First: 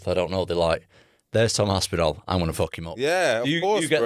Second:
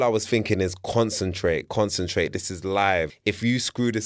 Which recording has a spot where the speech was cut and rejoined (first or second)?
second